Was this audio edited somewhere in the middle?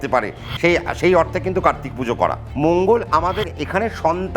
yes; 1 cut; at 2.4 s

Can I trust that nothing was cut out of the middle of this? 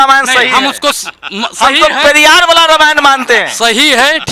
yes; 0 cuts

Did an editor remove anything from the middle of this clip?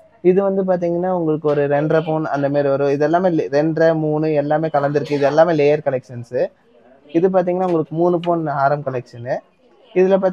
no; 0 cuts

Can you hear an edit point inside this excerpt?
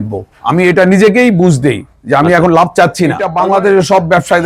yes; 1 cut; at 3.2 s

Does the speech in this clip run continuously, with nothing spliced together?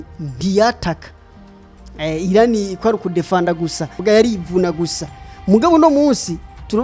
no; 1 cut; at 4.0 s

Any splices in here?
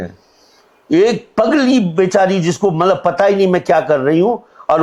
no; 0 cuts

